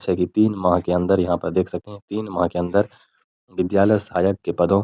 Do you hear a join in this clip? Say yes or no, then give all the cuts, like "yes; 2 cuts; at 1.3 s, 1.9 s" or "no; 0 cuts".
no; 0 cuts